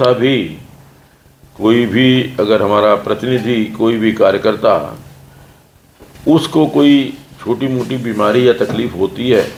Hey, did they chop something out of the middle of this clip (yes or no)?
no